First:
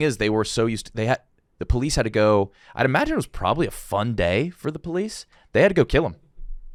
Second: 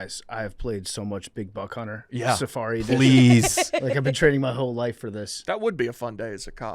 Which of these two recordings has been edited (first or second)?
second